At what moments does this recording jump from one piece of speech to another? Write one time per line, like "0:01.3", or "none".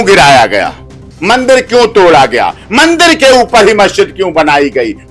none